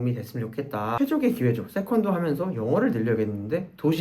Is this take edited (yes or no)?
yes